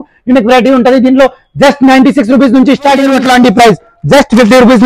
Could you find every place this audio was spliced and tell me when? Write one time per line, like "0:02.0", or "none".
0:03.1

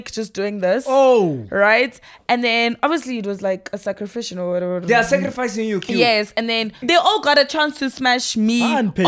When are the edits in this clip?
0:06.8

